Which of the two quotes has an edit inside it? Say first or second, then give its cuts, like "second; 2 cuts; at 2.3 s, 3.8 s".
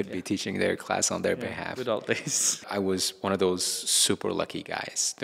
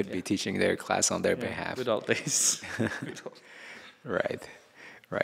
first; 1 cut; at 2.6 s